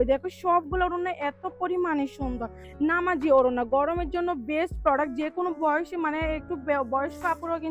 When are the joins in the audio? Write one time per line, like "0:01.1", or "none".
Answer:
0:02.6